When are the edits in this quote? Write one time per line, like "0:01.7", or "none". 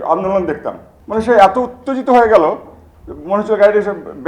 0:00.9